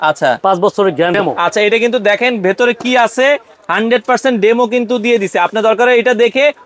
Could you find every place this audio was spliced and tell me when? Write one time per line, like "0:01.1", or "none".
0:01.3